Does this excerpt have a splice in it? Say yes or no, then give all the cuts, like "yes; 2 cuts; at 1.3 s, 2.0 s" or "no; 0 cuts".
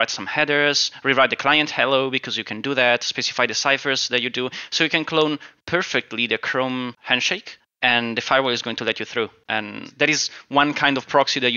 yes; 2 cuts; at 7.1 s, 9.4 s